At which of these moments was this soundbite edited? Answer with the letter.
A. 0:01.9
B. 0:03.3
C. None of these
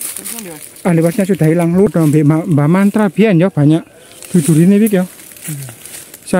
A